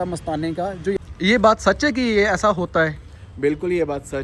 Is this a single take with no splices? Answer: no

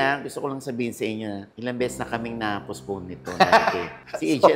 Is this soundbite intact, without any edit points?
yes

